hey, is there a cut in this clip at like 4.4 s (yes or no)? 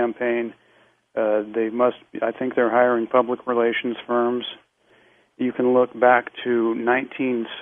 yes